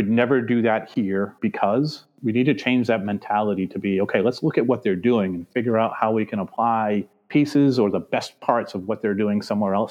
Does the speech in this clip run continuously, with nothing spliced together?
yes; 0 cuts

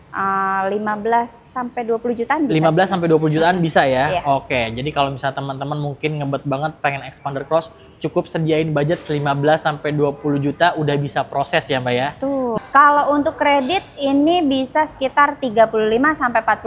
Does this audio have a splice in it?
yes; 1 cut; at 12.5 s

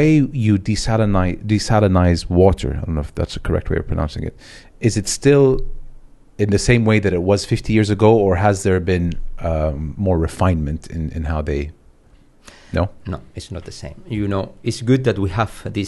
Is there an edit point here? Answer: no; 0 cuts

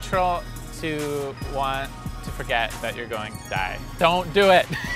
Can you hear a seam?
yes; 1 cut; at 3.9 s

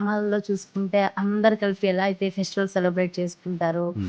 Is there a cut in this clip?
no; 0 cuts

